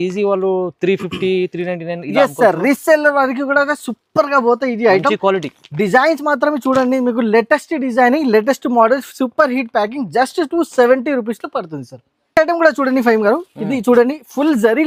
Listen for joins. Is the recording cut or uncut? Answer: uncut